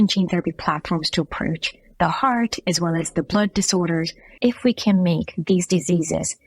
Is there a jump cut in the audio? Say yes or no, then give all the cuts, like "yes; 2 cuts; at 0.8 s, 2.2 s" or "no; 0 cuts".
yes; 1 cut; at 4.2 s